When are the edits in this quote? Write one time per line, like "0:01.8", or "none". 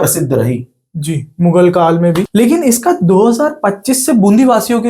0:02.3